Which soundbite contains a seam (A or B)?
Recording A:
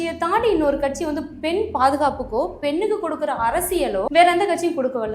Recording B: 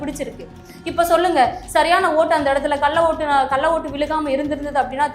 A